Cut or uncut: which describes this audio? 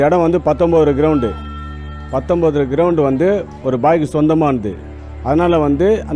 uncut